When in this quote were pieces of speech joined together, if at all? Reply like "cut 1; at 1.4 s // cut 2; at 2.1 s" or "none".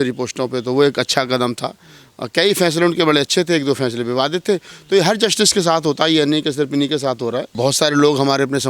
cut 1; at 7.5 s